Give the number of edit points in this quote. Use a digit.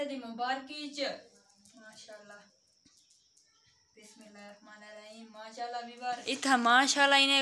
1